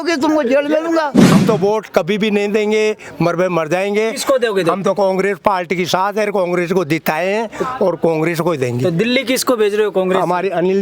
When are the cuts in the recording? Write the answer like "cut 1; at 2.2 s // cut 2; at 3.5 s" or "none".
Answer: cut 1; at 1.2 s

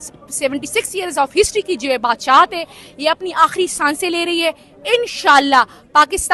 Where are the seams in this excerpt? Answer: none

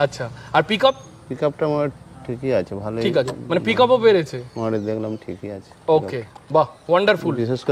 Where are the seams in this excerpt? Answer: none

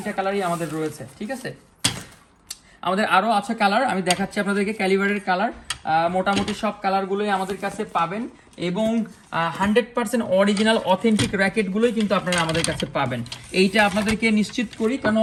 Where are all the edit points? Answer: none

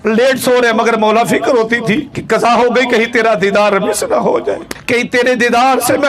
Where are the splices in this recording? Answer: cut 1; at 2.1 s // cut 2; at 4.7 s

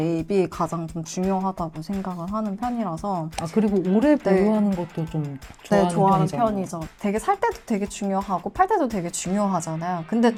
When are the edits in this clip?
none

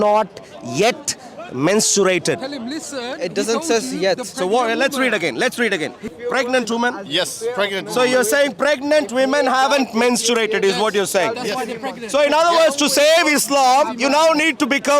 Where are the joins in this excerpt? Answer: cut 1; at 6.1 s

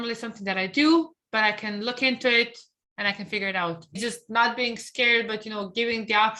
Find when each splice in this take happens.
cut 1; at 4.0 s

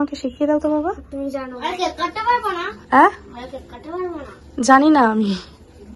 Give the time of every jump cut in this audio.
cut 1; at 1.6 s

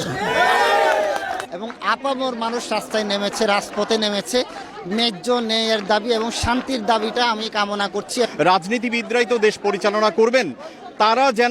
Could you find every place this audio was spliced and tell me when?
cut 1; at 1.4 s // cut 2; at 8.3 s

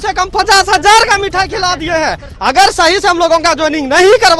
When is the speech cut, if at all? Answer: cut 1; at 2.3 s

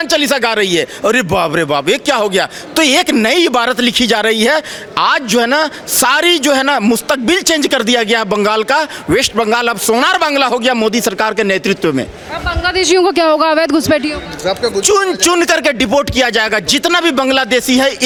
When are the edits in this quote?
none

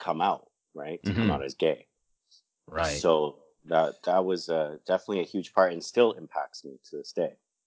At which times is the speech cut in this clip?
none

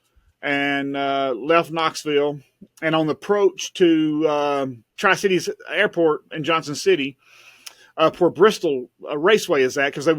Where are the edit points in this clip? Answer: cut 1; at 4.9 s

